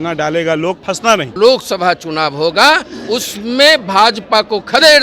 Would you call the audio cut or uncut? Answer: cut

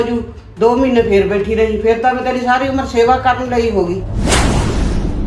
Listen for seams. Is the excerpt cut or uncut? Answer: cut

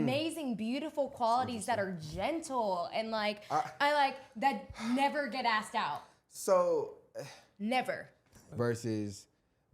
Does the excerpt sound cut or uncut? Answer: cut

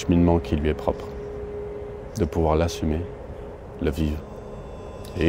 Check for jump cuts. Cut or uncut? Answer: uncut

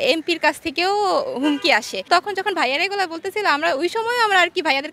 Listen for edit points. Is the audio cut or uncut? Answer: cut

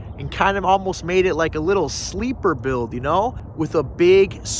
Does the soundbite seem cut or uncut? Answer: cut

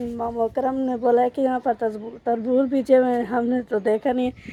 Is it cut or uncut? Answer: uncut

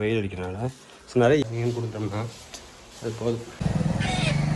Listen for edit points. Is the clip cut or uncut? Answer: cut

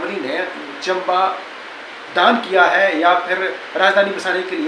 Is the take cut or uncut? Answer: uncut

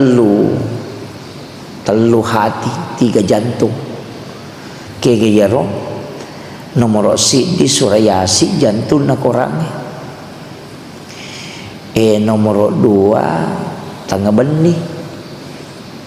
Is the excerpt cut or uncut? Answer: uncut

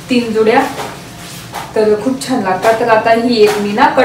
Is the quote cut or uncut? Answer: uncut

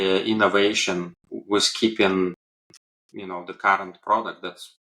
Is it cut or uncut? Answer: uncut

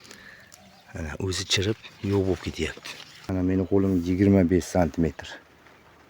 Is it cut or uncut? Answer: cut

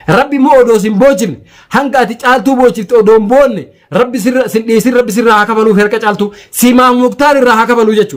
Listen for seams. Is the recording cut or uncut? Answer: uncut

